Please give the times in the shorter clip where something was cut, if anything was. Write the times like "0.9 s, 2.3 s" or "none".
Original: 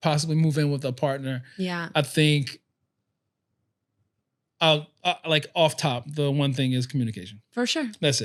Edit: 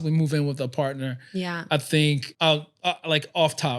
2.3 s